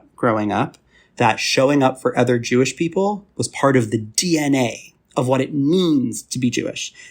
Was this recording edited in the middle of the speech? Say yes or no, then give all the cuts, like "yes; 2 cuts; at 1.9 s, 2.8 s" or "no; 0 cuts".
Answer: yes; 1 cut; at 1.0 s